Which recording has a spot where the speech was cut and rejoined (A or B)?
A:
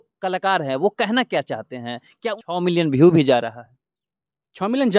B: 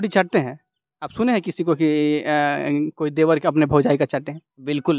A